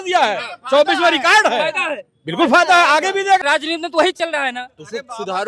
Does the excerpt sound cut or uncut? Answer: cut